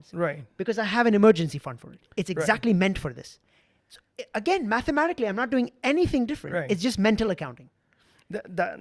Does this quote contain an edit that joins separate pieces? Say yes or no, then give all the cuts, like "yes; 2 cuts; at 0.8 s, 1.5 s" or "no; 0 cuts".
no; 0 cuts